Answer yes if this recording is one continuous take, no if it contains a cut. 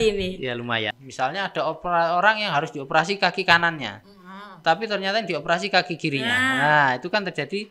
no